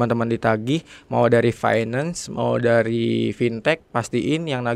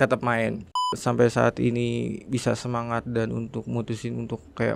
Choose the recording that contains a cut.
second; 1 cut; at 0.9 s

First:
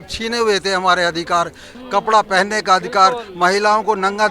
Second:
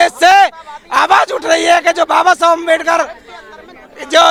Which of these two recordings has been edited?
first; 1 cut; at 1.7 s

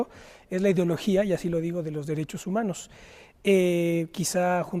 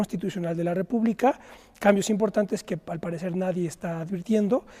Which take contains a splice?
second; 1 cut; at 3.9 s

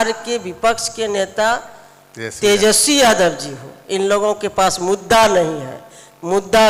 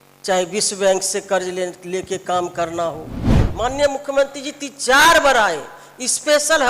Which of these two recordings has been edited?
second; 1 cut; at 3.4 s

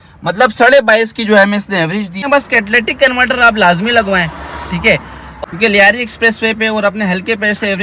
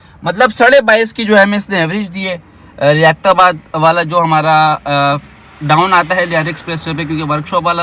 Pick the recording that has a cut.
first; 2 cuts; at 2.2 s, 5.3 s

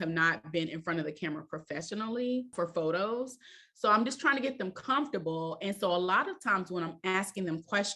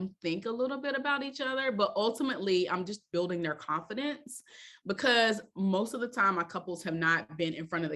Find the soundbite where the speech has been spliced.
first; 1 cut; at 2.5 s

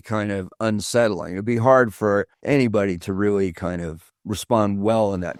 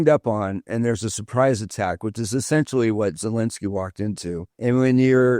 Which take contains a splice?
second; 1 cut; at 4.5 s

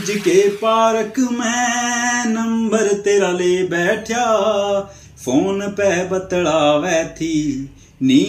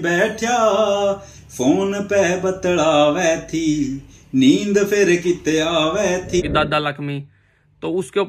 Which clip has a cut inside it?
second; 1 cut; at 6.4 s

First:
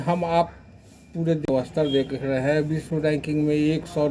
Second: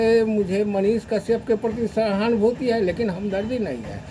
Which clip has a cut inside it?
first; 1 cut; at 1.5 s

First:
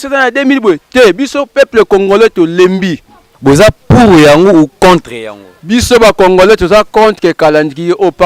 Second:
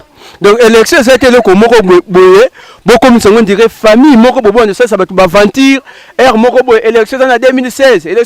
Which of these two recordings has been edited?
first; 1 cut; at 3.3 s

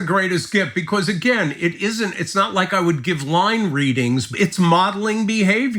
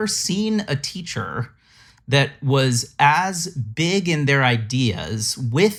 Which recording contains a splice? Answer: first; 1 cut; at 4.3 s

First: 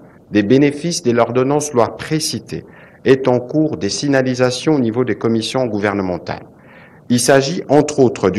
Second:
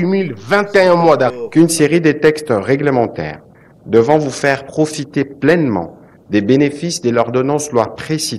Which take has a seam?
second; 1 cut; at 1.3 s

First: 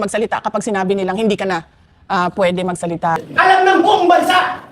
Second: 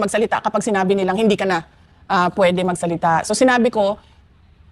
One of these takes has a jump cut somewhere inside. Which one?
first; 1 cut; at 3.2 s

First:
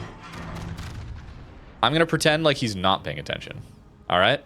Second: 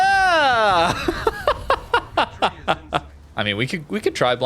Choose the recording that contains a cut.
second; 1 cut; at 3.2 s

